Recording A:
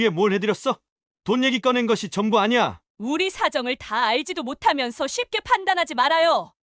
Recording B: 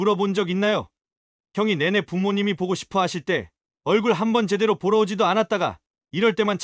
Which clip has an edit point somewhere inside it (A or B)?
A